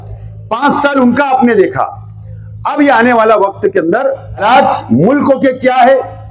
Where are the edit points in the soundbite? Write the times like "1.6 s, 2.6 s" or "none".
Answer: 4.4 s